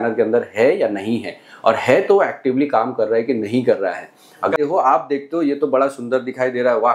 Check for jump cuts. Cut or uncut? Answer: cut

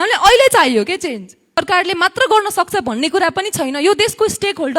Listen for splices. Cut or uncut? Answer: cut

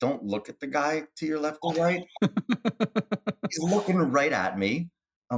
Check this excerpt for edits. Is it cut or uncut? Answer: uncut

